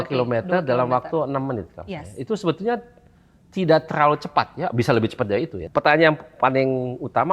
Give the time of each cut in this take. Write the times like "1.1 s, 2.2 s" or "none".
5.6 s